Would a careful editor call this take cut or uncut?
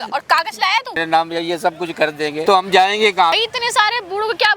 cut